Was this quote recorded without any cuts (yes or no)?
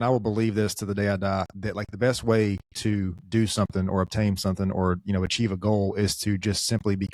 yes